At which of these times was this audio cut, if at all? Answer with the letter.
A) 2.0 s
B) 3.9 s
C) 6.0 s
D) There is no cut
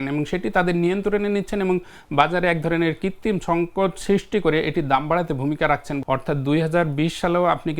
C